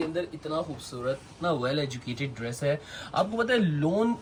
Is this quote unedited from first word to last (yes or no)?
yes